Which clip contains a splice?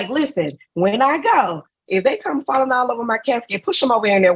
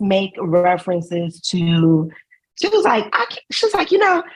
first; 1 cut; at 1.8 s

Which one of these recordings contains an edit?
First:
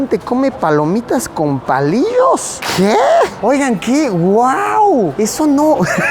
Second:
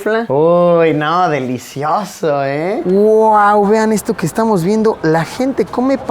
second; 1 cut; at 2.8 s

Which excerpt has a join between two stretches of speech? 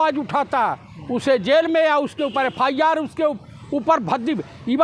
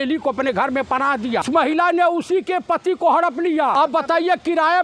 second; 2 cuts; at 1.4 s, 3.7 s

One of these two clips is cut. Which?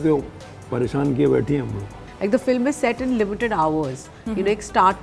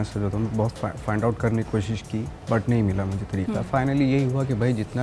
first; 1 cut; at 1.8 s

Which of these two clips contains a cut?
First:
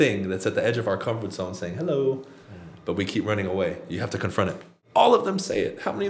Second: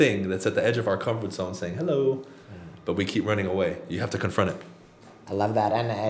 first; 1 cut; at 4.7 s

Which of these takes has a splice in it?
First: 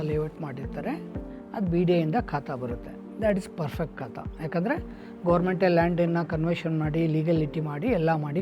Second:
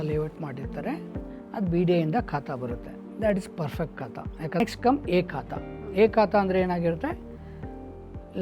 second; 1 cut; at 4.6 s

